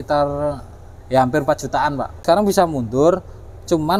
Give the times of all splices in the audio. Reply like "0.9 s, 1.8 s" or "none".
2.2 s